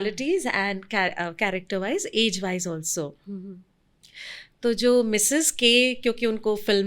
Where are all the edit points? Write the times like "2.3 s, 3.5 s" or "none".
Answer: none